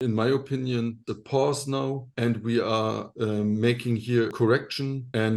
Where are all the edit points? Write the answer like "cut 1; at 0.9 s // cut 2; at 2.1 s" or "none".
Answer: cut 1; at 1.1 s // cut 2; at 4.3 s